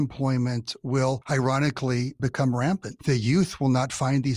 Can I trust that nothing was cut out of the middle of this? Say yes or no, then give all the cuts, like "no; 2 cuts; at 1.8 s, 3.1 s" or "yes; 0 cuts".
no; 2 cuts; at 1.2 s, 2.9 s